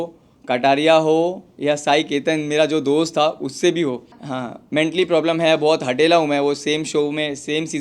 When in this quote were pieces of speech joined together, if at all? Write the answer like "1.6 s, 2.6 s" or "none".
4.1 s